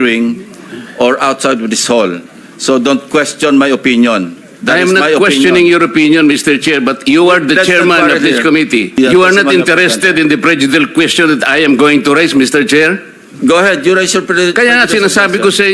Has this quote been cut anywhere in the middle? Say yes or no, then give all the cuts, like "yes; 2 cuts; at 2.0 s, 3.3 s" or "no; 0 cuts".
yes; 1 cut; at 9.0 s